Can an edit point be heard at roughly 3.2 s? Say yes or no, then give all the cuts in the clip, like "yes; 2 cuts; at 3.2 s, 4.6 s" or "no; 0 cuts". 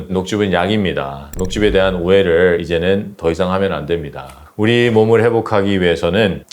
no; 1 cut; at 4.5 s